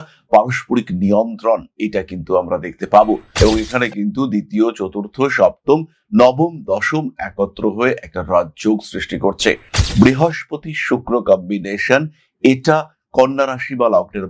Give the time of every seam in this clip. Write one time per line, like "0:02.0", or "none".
0:03.3